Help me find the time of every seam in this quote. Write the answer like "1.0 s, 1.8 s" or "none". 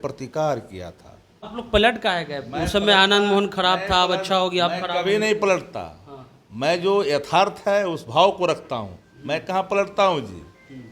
1.5 s

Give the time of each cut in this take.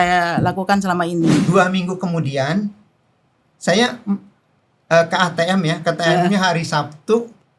1.4 s

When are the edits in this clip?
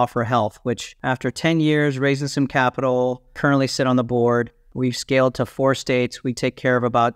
0.9 s, 3.4 s, 4.7 s

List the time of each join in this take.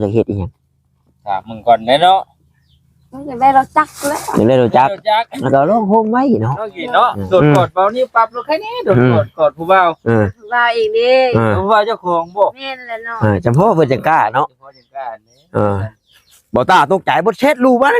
6.8 s

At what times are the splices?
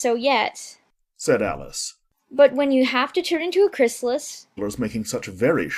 none

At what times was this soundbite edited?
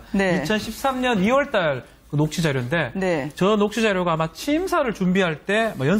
2.3 s

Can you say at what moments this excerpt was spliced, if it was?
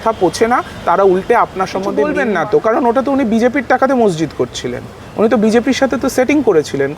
2.2 s

